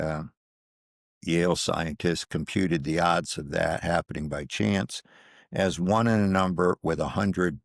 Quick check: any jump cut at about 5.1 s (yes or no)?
no